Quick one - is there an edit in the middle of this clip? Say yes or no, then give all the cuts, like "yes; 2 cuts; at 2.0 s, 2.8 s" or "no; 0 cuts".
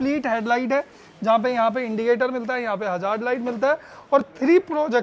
no; 0 cuts